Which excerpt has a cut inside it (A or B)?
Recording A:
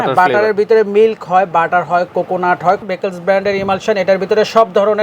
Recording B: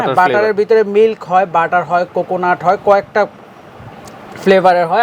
A